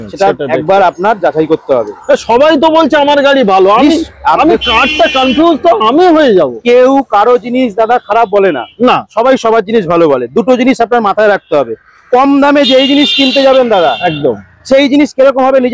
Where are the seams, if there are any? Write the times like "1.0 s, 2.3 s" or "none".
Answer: none